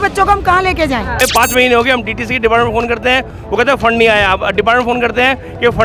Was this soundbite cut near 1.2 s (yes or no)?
yes